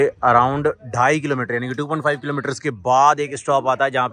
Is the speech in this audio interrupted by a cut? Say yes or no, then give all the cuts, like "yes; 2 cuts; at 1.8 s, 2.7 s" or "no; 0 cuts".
no; 0 cuts